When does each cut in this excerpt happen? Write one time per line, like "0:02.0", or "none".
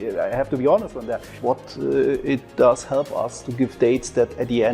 0:01.3